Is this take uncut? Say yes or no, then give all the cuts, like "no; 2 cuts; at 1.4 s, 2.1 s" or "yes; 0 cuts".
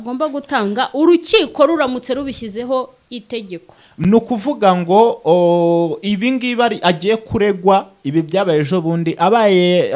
yes; 0 cuts